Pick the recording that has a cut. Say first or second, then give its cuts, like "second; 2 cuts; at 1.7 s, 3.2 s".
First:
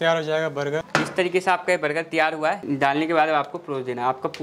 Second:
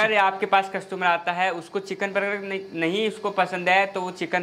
first; 2 cuts; at 0.9 s, 2.6 s